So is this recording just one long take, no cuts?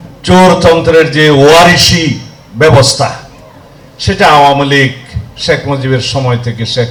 yes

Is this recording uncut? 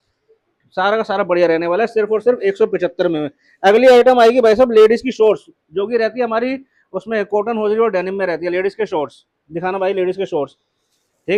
yes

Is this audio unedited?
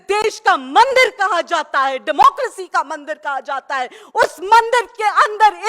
yes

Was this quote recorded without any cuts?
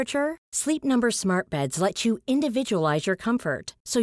yes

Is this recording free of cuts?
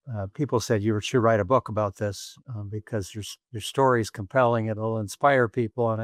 yes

